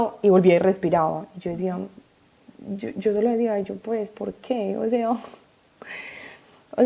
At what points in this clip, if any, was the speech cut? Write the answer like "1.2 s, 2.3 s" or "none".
none